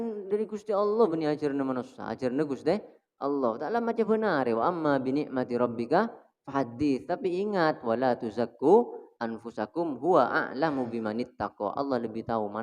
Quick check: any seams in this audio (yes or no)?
no